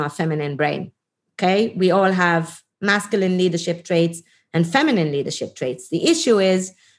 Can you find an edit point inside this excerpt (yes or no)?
no